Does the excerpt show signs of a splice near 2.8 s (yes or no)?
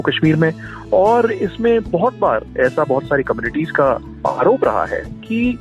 no